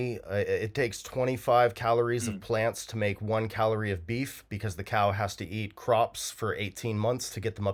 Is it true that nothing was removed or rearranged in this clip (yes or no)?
yes